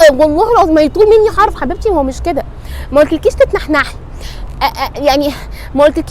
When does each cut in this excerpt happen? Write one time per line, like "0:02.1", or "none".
none